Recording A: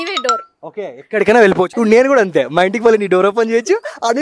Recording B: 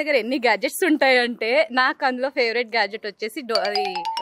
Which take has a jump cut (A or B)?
A